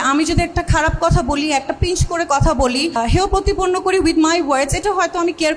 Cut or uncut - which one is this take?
cut